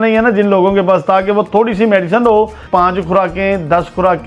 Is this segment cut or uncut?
cut